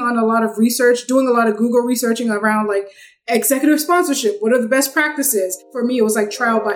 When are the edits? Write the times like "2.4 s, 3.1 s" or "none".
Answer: 5.7 s